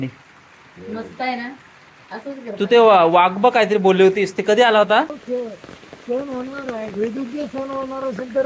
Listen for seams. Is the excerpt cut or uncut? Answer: cut